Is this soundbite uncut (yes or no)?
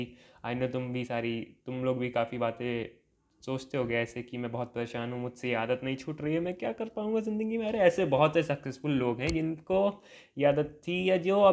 yes